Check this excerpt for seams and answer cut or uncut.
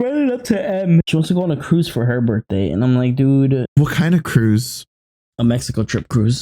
cut